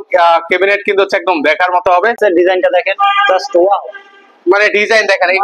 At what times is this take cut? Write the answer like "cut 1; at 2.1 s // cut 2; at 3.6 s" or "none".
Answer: cut 1; at 2.2 s